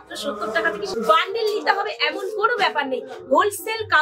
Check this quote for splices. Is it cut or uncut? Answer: cut